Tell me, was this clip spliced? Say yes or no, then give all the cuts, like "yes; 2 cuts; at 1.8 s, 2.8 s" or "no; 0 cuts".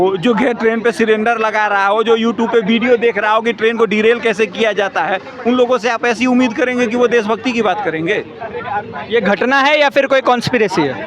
no; 0 cuts